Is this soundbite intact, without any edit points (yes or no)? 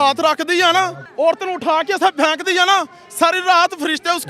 no